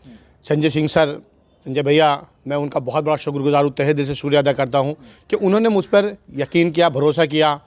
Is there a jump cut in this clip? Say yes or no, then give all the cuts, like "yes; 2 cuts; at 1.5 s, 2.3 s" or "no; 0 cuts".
no; 0 cuts